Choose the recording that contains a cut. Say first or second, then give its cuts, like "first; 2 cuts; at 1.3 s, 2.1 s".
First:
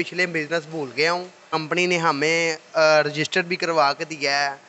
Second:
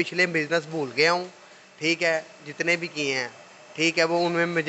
first; 1 cut; at 1.5 s